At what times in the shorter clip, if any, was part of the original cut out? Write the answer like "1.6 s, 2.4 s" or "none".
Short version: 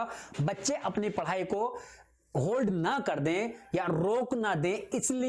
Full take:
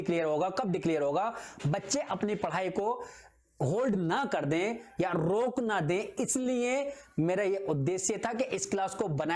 none